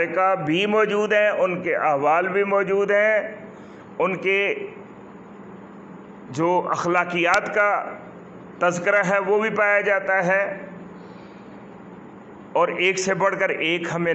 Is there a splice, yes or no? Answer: no